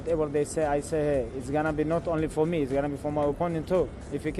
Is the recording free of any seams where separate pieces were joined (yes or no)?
yes